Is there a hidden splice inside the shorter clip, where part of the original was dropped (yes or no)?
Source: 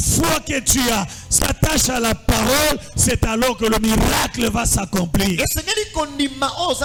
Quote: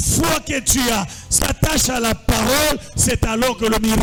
no